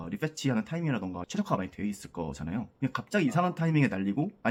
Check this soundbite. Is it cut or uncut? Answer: uncut